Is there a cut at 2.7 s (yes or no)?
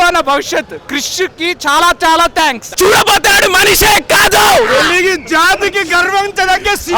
yes